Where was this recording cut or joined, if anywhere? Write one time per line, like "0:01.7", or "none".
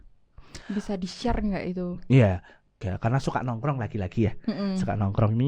0:02.7